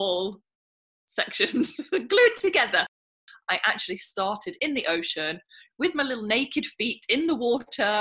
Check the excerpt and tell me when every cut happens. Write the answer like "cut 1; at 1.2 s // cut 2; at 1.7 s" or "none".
cut 1; at 3.2 s